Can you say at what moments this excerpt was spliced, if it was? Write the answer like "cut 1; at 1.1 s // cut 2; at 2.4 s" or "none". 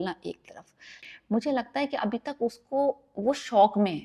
cut 1; at 1.0 s